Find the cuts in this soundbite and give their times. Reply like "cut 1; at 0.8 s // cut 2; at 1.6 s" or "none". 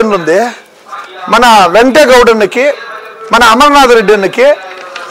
none